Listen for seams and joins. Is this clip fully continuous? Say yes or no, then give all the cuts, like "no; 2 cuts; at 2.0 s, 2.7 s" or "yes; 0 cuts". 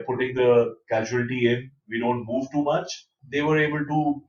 no; 1 cut; at 3.2 s